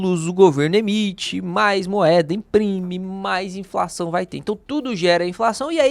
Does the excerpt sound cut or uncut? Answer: cut